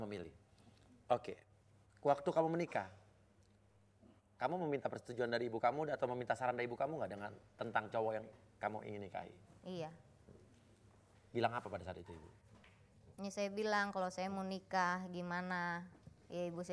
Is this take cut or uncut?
uncut